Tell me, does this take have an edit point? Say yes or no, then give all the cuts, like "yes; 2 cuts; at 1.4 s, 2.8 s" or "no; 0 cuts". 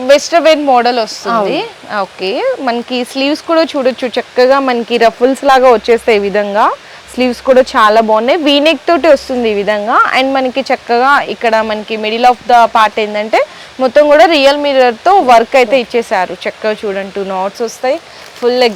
no; 0 cuts